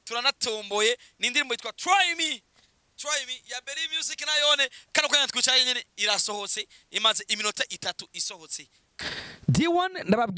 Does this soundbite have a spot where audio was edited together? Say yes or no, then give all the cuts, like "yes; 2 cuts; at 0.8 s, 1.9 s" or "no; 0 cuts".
yes; 1 cut; at 8.9 s